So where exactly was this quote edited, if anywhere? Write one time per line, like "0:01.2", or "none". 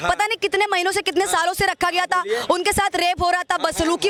none